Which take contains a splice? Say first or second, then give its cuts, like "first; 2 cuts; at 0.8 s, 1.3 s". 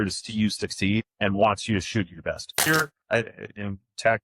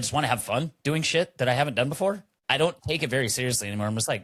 first; 2 cuts; at 1.1 s, 2.6 s